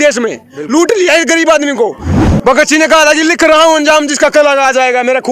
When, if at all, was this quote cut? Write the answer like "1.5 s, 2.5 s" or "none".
none